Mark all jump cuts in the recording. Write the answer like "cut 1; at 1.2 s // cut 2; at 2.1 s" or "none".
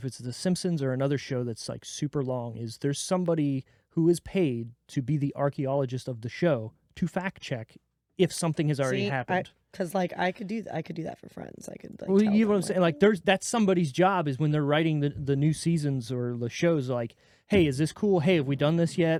none